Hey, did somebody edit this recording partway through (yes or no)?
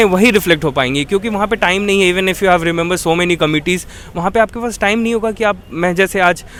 no